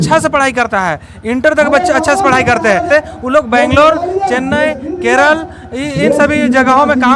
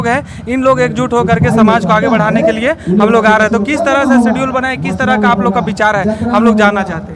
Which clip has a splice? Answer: first; 1 cut; at 2.9 s

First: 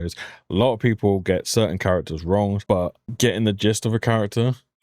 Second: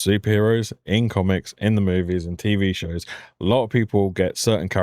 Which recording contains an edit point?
first; 1 cut; at 3.0 s

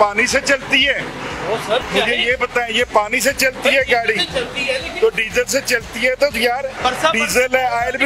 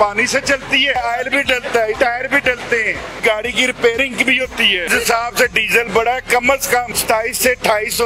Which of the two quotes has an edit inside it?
second; 5 cuts; at 0.9 s, 2.0 s, 3.2 s, 4.9 s, 6.9 s

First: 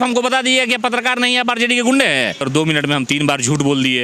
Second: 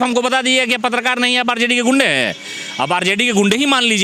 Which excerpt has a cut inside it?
first; 1 cut; at 2.4 s

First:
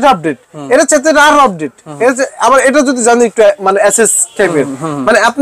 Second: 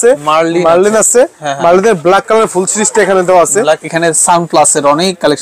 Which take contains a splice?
second; 1 cut; at 3.8 s

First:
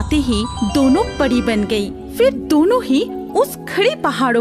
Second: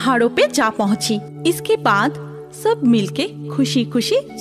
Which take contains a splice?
second; 1 cut; at 1.3 s

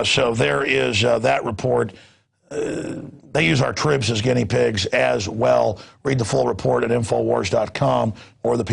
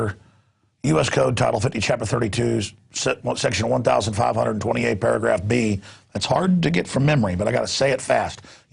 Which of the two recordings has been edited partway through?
first; 1 cut; at 0.9 s

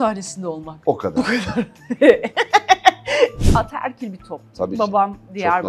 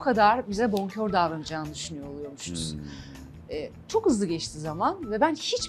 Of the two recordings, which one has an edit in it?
first; 1 cut; at 3.4 s

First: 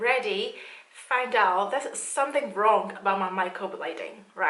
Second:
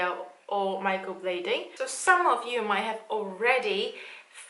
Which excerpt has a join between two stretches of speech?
second; 1 cut; at 1.7 s

